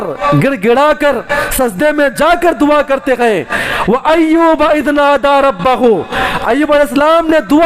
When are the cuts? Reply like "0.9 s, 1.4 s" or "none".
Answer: none